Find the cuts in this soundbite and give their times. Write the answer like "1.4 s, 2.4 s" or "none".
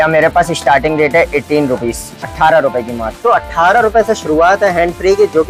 none